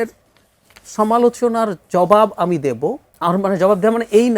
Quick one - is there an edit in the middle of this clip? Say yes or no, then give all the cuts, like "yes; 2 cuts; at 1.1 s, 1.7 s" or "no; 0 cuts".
yes; 1 cut; at 3.1 s